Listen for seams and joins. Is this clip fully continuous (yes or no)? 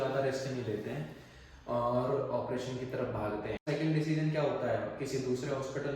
no